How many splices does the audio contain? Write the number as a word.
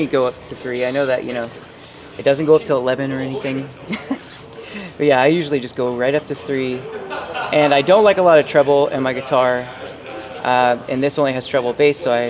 zero